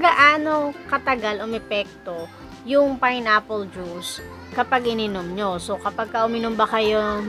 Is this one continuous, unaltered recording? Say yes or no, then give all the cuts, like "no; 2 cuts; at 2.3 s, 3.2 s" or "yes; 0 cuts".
yes; 0 cuts